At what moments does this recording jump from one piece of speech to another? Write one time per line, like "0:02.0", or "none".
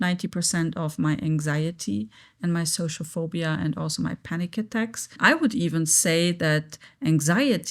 0:05.2